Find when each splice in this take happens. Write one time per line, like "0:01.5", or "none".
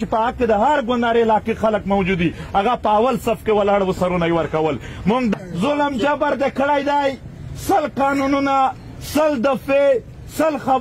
0:05.3